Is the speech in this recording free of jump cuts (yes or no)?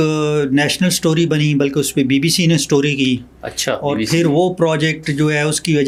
yes